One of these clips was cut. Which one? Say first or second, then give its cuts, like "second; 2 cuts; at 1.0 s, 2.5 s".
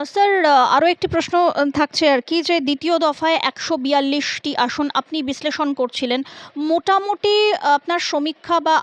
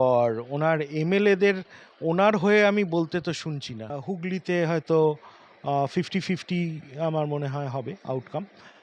second; 1 cut; at 4.0 s